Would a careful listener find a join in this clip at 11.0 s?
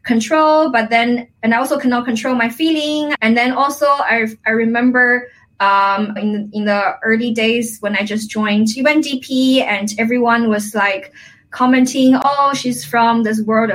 no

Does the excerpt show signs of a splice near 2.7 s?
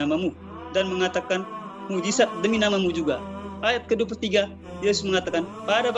no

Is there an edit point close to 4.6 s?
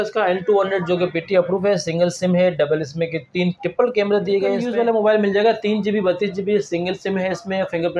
yes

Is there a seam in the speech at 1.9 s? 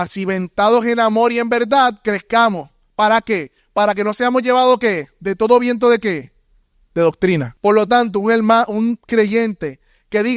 no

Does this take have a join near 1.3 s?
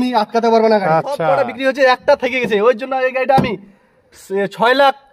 yes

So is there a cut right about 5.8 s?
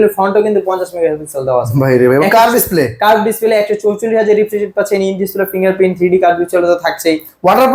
no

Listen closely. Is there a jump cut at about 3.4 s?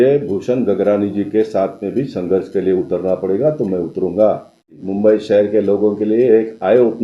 no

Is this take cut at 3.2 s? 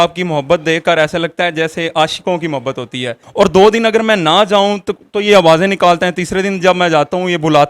yes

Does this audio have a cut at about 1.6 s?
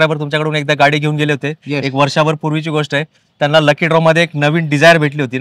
no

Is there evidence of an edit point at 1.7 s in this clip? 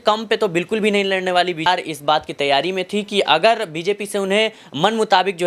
yes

